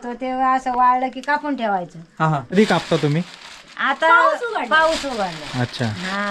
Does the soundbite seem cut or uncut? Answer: cut